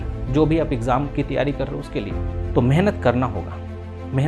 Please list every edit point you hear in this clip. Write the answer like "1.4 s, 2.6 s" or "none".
2.4 s